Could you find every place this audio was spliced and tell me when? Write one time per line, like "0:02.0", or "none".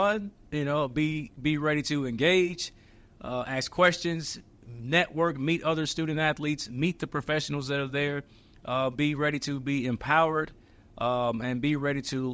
none